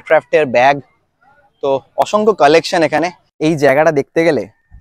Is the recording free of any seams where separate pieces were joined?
no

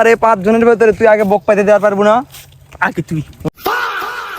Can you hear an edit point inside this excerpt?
yes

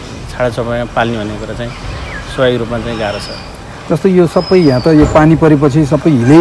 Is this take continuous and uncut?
yes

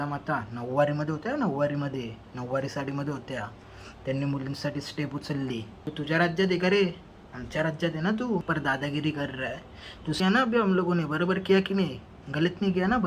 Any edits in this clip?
yes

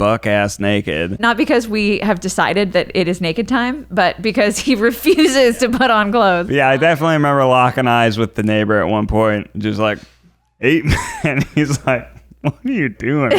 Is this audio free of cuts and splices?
no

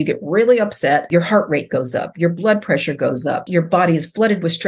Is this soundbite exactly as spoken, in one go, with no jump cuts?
no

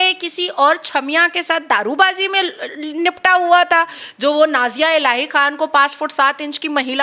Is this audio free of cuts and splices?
yes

